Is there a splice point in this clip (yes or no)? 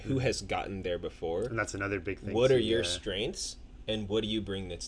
no